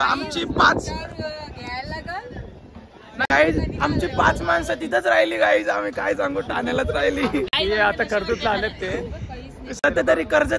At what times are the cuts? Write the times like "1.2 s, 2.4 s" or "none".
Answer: none